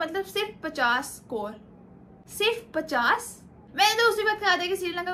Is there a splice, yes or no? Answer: no